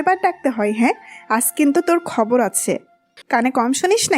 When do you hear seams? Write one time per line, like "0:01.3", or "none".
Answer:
0:03.1